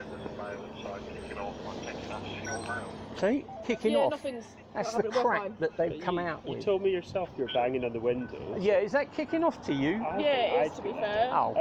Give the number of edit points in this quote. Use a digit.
0